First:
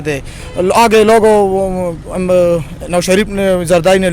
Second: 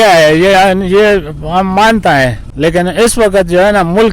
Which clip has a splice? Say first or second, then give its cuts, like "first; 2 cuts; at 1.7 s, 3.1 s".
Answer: second; 1 cut; at 2.4 s